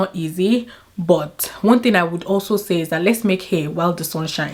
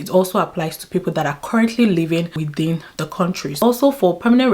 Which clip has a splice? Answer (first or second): second